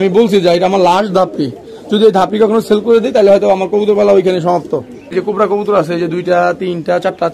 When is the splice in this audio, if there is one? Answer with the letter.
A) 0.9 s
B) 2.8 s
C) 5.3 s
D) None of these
C